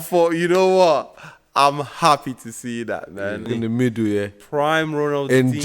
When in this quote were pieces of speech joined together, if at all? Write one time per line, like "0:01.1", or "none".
0:03.5

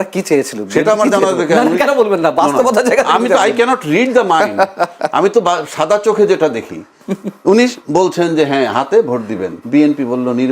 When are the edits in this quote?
0:09.5

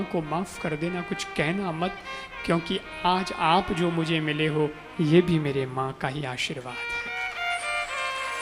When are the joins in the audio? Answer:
none

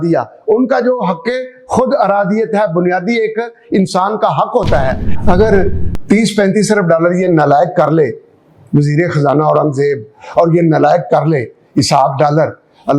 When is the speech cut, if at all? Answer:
0:05.0

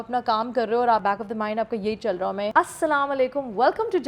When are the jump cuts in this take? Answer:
0:01.0
0:02.4

